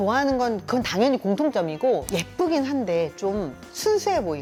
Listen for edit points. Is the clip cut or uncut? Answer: uncut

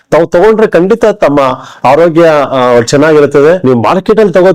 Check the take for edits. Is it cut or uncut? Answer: cut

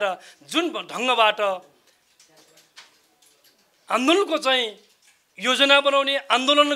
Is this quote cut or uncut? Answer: uncut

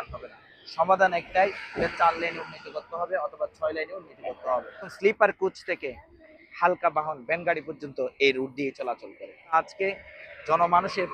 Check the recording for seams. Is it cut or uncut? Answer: cut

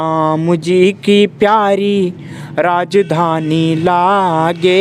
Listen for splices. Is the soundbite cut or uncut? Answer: uncut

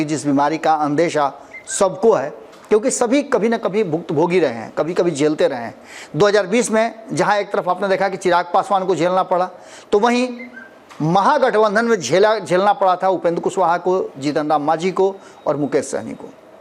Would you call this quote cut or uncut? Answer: uncut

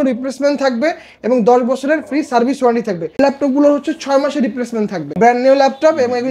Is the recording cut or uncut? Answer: cut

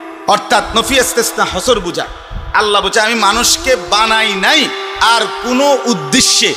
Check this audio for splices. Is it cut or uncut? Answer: uncut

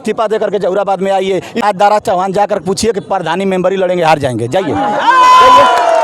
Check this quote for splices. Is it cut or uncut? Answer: cut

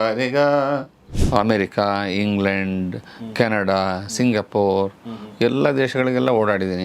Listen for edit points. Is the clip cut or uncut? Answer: cut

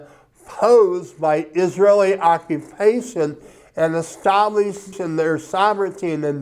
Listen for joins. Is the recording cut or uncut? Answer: cut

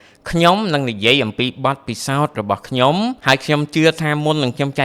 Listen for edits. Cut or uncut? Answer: cut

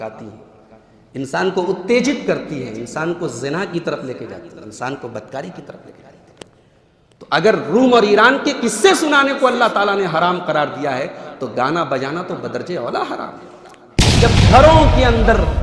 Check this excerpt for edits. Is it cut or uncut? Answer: cut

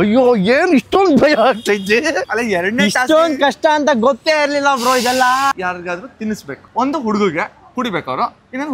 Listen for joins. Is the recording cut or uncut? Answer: cut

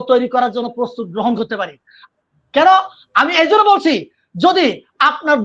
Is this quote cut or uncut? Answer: uncut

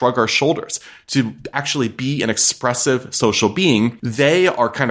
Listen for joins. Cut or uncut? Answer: uncut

